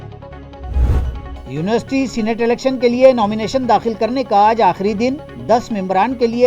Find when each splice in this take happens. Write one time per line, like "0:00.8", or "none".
0:00.9

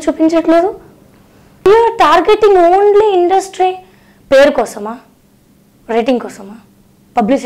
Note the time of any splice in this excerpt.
0:01.6

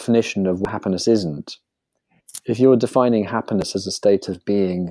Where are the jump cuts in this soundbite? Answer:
none

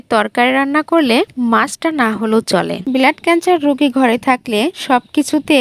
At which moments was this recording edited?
0:02.8

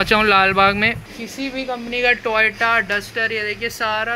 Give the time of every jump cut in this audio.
0:01.0

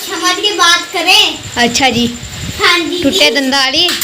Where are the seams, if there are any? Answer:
none

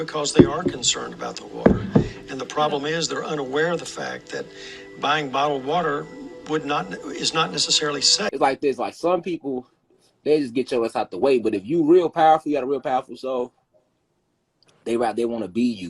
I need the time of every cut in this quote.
0:08.3

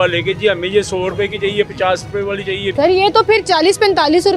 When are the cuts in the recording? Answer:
0:02.7

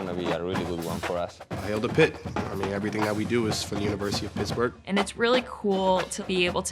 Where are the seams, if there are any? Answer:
0:01.6
0:04.8

